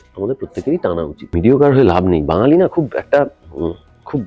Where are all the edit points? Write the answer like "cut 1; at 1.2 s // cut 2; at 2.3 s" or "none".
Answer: cut 1; at 1.3 s